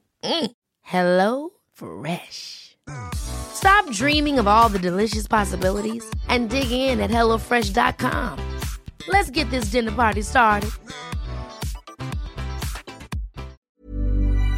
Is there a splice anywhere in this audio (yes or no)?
yes